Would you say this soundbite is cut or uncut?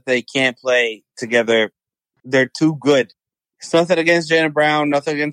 cut